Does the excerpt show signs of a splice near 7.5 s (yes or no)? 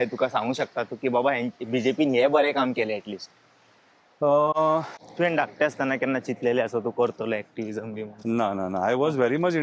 no